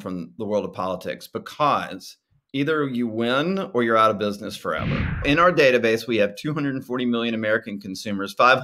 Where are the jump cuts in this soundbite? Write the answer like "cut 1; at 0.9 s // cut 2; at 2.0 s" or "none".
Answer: cut 1; at 5.2 s